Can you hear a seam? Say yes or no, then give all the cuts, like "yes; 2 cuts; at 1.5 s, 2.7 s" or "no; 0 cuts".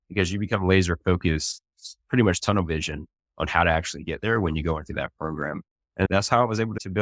yes; 1 cut; at 6.1 s